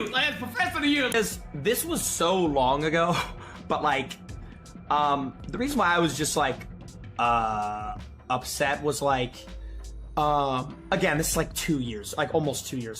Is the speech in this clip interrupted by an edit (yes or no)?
yes